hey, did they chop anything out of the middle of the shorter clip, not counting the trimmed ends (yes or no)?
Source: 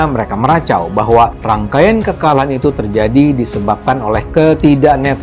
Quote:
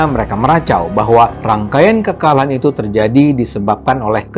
no